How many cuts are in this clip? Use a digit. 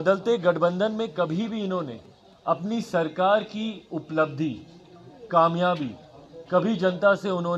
0